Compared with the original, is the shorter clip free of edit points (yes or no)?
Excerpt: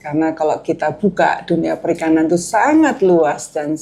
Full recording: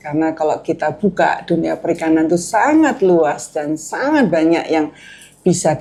yes